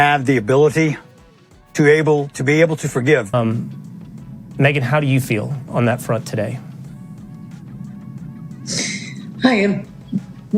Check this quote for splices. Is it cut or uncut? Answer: cut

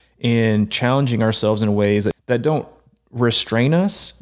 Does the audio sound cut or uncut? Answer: cut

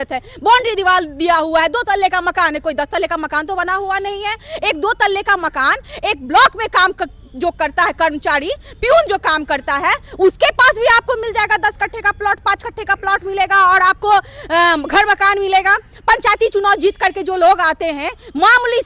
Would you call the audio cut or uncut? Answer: uncut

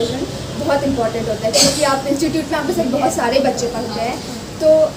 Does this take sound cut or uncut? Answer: uncut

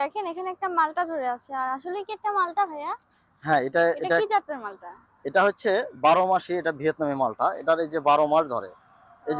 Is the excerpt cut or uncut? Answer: uncut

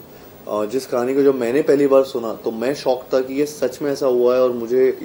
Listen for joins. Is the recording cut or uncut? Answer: uncut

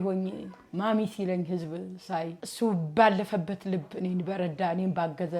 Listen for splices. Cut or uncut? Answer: cut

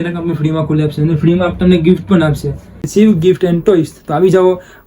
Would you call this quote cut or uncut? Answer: cut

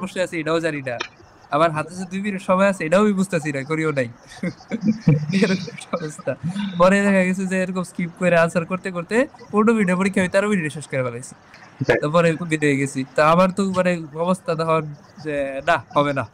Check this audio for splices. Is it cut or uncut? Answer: uncut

